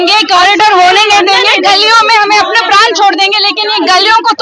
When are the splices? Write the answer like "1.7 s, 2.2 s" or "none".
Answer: none